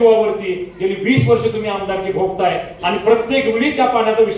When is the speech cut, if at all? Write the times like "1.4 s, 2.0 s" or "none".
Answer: none